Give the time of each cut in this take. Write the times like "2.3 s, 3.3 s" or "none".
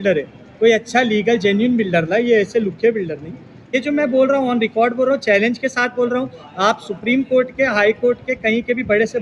3.8 s